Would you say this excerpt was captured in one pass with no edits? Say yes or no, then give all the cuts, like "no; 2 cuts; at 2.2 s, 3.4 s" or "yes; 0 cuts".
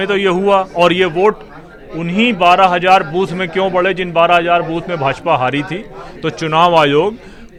yes; 0 cuts